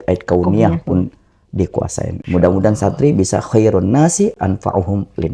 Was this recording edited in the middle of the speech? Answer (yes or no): yes